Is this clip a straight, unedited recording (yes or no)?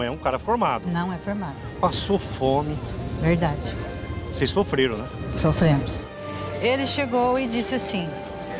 no